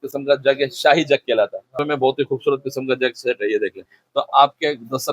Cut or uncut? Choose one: cut